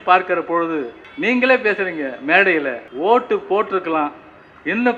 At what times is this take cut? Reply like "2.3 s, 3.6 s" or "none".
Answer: 1.0 s, 2.8 s